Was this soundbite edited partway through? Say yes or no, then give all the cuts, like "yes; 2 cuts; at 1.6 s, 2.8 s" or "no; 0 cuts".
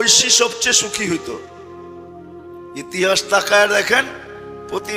yes; 2 cuts; at 1.4 s, 2.8 s